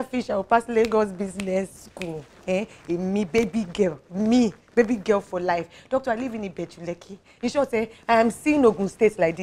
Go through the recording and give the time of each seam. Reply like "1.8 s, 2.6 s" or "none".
none